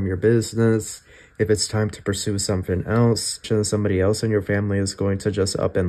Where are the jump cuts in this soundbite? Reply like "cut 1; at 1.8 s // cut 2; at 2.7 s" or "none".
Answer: cut 1; at 3.5 s